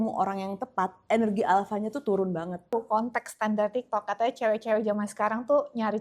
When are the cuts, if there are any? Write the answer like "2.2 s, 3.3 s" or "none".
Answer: 2.7 s